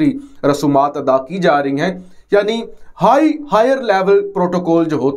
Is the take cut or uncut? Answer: uncut